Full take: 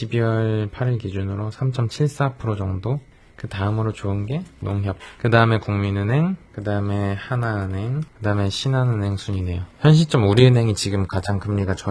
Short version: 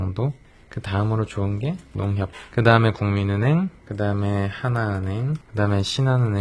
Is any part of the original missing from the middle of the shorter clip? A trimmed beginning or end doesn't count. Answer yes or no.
no